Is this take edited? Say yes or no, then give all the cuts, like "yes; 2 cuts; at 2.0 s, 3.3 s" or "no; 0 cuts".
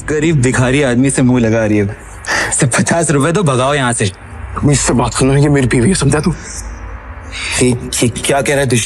no; 0 cuts